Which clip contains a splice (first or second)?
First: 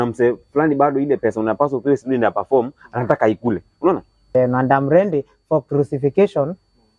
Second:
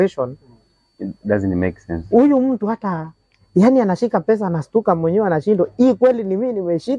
first